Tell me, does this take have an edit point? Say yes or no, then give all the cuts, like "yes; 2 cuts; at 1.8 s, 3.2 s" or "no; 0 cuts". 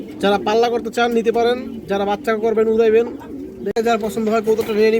yes; 1 cut; at 3.8 s